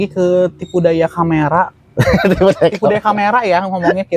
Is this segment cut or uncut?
uncut